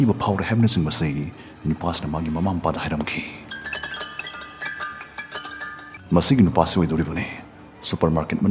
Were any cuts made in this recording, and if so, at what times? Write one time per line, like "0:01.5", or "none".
0:06.0